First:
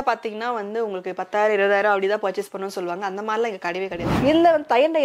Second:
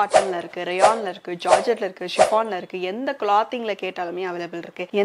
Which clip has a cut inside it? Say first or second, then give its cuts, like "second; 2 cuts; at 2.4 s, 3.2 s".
first; 1 cut; at 4.1 s